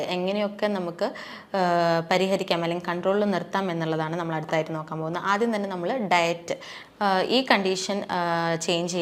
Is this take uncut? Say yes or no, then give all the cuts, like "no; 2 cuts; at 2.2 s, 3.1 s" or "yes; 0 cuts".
yes; 0 cuts